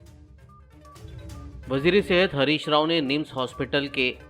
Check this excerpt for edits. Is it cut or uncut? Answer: cut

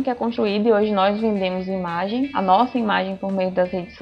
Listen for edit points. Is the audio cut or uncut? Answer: uncut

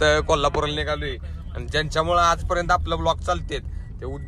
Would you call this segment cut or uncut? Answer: uncut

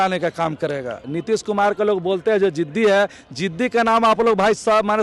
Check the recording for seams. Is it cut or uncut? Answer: cut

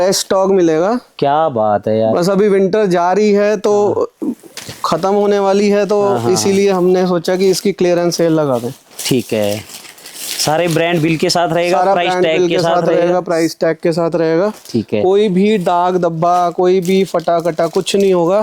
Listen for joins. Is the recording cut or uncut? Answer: uncut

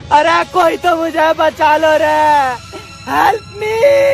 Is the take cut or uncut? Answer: uncut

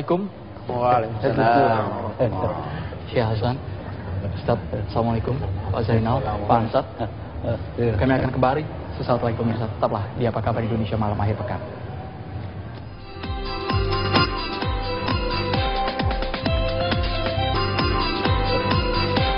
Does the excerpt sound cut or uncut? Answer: cut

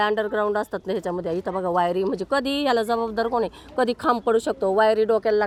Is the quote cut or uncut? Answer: uncut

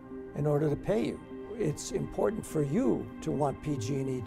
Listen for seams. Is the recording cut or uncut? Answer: cut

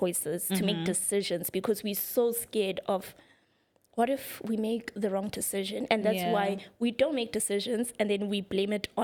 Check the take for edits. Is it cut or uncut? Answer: uncut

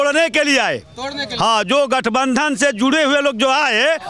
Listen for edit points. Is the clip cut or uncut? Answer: uncut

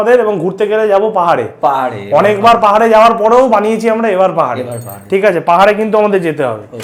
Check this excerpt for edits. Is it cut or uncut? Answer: uncut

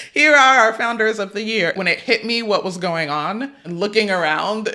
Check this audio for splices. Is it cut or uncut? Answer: cut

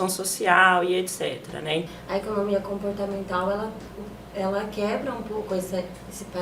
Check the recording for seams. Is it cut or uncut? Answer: cut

